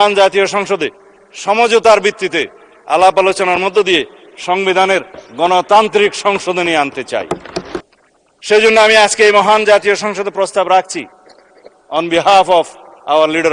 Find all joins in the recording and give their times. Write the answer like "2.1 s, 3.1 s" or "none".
7.8 s